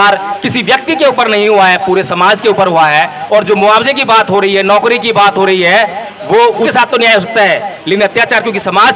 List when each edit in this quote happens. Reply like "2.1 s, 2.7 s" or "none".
6.7 s